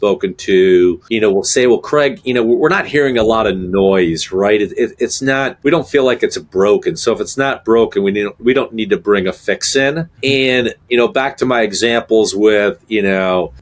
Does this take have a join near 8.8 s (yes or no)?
no